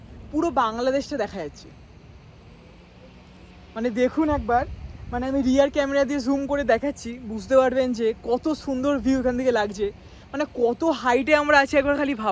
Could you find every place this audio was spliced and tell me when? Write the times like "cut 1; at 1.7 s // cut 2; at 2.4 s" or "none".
none